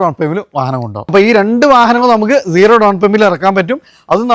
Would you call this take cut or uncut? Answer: cut